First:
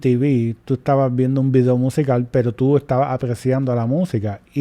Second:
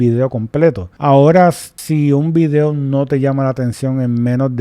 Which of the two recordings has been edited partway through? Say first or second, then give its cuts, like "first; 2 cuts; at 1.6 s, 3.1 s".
second; 2 cuts; at 0.9 s, 1.7 s